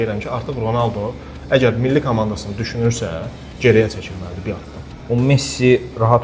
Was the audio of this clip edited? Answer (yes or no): yes